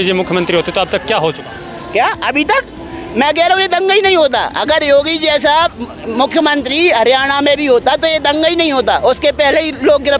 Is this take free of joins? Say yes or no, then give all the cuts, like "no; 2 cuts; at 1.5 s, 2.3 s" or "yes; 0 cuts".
yes; 0 cuts